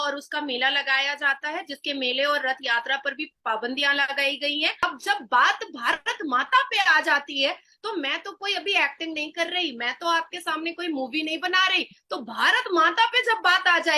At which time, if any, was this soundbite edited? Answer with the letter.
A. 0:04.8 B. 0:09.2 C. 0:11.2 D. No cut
A